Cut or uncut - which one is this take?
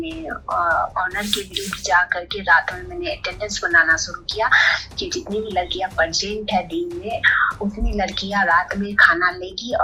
uncut